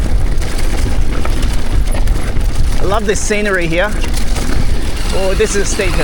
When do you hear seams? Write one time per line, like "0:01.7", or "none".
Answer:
none